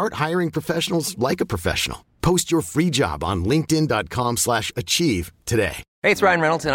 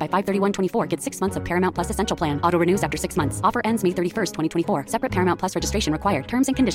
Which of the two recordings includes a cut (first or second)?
first